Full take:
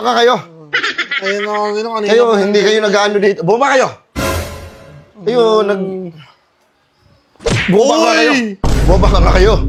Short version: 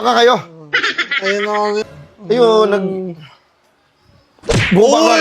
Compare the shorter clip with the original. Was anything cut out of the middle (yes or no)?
yes